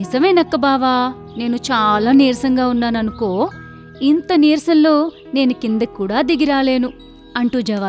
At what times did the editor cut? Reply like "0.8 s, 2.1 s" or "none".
none